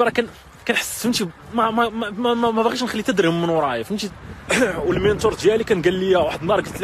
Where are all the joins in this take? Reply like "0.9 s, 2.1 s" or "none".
4.1 s